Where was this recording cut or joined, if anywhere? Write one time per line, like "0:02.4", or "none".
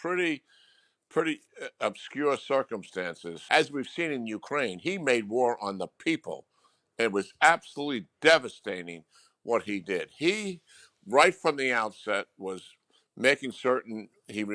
0:03.3